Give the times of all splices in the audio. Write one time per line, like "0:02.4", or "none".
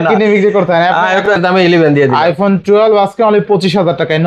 0:01.2